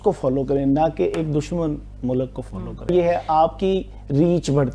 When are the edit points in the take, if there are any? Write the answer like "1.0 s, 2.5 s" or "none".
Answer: 2.9 s